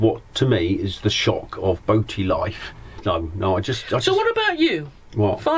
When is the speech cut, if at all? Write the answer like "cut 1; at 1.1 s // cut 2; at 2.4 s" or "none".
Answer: cut 1; at 2.9 s

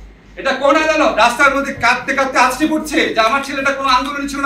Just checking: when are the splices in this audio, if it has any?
cut 1; at 1.1 s

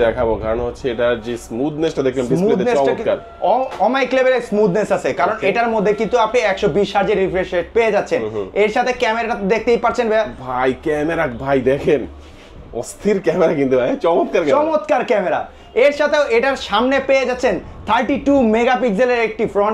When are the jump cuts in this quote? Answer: none

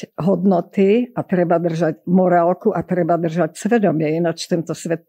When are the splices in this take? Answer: none

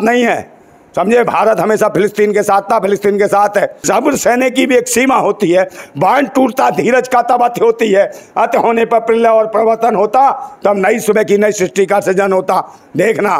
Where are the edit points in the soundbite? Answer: cut 1; at 3.8 s

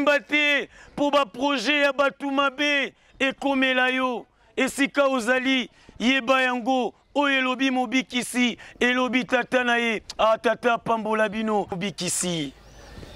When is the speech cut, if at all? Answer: cut 1; at 11.8 s

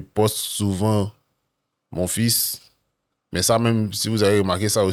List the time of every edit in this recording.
none

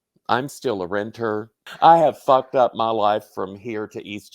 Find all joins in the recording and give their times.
cut 1; at 1.6 s

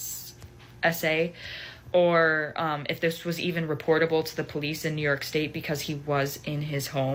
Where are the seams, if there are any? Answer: none

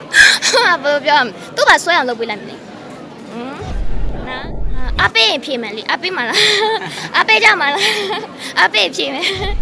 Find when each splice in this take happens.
none

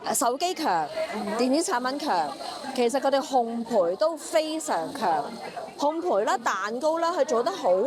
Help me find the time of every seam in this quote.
none

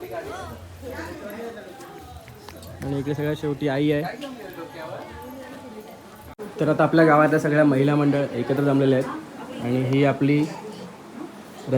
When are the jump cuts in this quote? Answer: cut 1; at 6.3 s

